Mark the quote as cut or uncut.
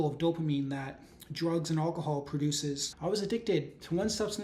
cut